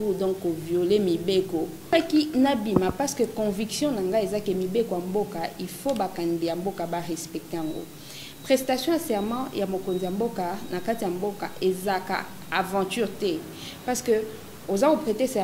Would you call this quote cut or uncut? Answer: cut